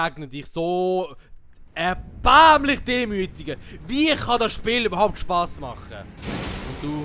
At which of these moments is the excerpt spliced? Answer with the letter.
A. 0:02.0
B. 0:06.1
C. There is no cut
B